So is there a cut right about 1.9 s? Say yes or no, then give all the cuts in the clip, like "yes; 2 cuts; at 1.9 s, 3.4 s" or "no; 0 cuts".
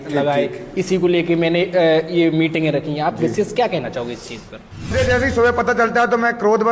no; 1 cut; at 4.9 s